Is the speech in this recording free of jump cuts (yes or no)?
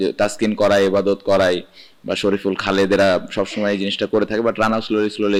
yes